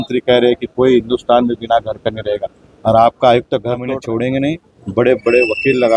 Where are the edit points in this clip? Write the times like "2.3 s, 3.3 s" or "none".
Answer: 4.0 s